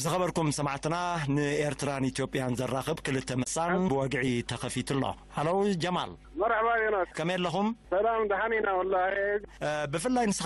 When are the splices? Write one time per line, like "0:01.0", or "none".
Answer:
0:03.5